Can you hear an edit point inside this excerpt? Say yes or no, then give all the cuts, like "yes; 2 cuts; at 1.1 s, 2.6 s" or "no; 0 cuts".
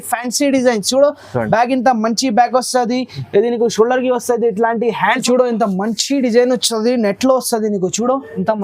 yes; 1 cut; at 5.2 s